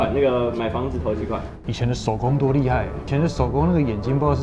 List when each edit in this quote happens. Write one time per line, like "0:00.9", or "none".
0:01.5
0:03.0